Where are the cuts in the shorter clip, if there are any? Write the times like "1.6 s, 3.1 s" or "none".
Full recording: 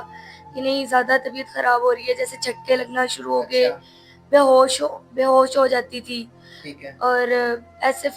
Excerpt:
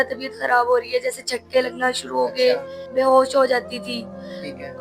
2.8 s